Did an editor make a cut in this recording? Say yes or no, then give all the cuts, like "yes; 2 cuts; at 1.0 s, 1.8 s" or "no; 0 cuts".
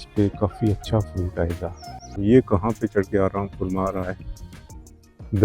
yes; 1 cut; at 2.2 s